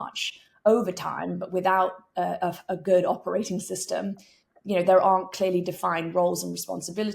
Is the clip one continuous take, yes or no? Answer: yes